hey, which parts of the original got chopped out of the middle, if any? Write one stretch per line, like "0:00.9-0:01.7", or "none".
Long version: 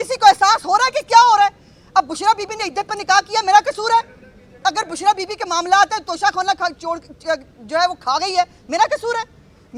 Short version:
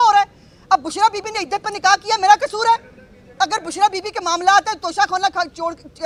none